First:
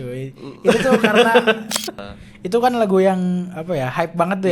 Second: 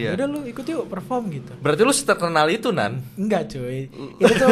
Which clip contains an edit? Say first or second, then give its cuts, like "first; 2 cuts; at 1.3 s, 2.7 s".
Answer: first; 1 cut; at 1.9 s